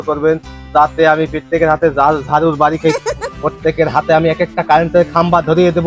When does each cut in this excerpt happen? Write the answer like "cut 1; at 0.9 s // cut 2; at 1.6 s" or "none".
cut 1; at 3.3 s